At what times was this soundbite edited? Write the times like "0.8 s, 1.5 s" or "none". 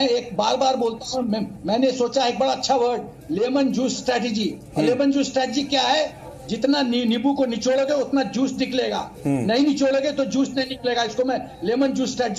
none